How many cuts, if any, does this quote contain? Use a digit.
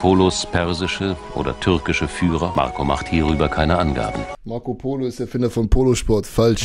2